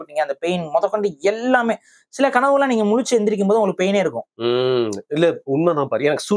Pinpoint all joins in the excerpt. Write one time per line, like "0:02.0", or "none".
none